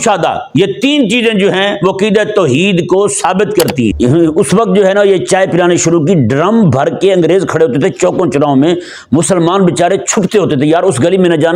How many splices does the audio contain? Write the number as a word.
one